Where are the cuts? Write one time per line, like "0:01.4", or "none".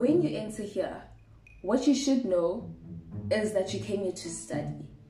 none